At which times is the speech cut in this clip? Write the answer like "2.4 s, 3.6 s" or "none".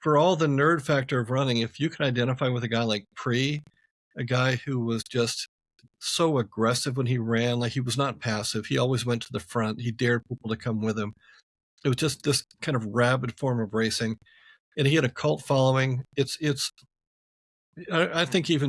none